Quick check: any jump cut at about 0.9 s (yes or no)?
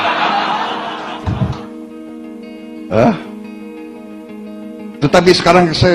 no